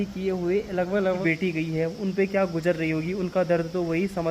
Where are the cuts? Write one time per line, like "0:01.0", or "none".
0:01.2